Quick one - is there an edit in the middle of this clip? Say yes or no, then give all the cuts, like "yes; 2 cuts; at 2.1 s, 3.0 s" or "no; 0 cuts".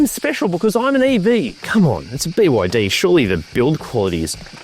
yes; 1 cut; at 1.5 s